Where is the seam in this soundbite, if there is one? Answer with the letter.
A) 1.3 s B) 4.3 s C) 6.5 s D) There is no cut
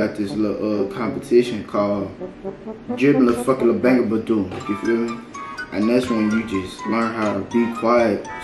D